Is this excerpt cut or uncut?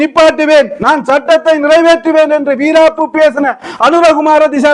uncut